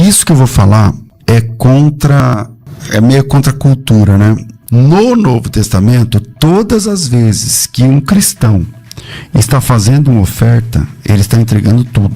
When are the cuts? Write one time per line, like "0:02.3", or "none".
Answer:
0:01.1
0:02.2
0:04.5